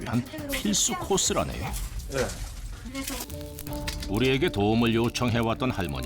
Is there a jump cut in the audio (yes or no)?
yes